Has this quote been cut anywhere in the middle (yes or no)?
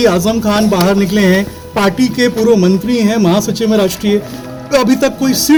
no